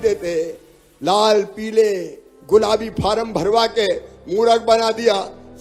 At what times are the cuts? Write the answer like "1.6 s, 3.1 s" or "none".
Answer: none